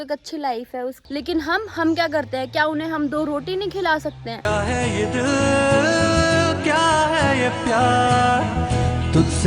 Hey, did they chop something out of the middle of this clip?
yes; 2 cuts; at 1.0 s, 4.4 s

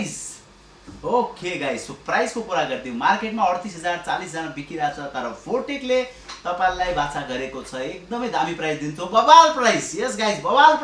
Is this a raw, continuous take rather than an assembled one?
yes; 0 cuts

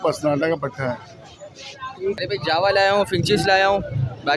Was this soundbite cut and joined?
yes; 1 cut; at 2.2 s

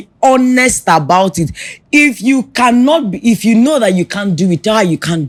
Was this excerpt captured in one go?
yes; 0 cuts

